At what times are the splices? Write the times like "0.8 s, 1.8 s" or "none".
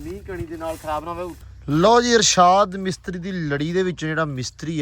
1.3 s